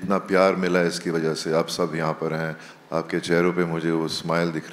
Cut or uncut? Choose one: uncut